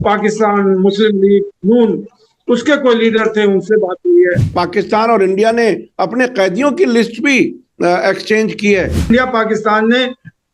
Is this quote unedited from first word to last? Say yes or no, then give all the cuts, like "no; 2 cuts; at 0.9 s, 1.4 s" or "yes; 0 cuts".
no; 2 cuts; at 4.6 s, 9.1 s